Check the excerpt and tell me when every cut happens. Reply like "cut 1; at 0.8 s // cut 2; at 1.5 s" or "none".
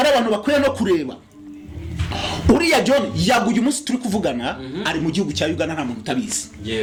none